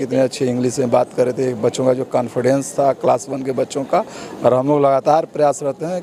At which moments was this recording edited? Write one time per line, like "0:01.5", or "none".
none